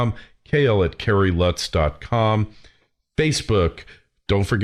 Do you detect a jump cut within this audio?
no; 0 cuts

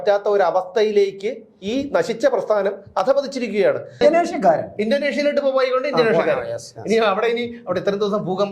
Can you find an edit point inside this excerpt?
yes; 1 cut; at 4.0 s

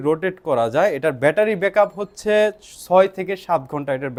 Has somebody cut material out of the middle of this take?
no; 0 cuts

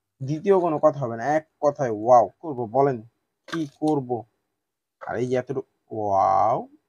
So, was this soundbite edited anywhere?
yes; 1 cut; at 2.5 s

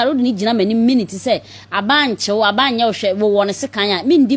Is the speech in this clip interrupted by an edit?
no; 0 cuts

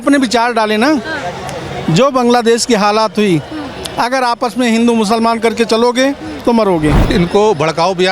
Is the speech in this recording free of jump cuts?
no; 1 cut; at 7.0 s

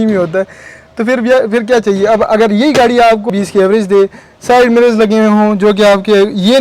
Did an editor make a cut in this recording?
yes; 1 cut; at 3.3 s

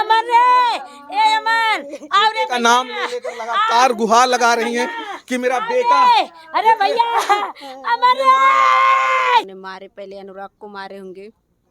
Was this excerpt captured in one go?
no; 1 cut; at 9.6 s

